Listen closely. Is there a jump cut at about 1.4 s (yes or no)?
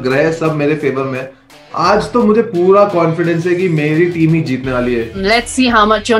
yes